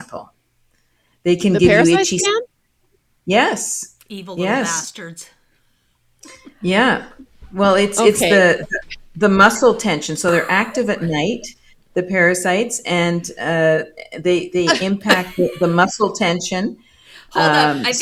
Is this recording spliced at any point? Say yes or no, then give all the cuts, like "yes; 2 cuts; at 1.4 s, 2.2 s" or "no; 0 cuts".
no; 0 cuts